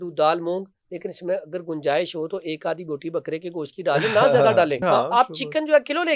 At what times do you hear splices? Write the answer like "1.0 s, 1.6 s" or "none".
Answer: 4.8 s